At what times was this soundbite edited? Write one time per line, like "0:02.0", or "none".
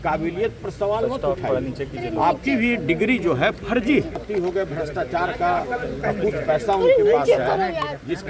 0:04.2